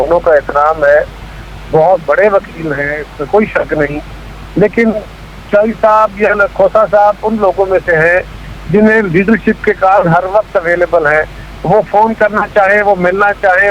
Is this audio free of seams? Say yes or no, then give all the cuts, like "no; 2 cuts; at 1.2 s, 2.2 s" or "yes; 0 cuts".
no; 1 cut; at 5.3 s